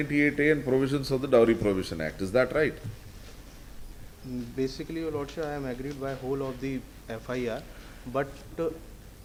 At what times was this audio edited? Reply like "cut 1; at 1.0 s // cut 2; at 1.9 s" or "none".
none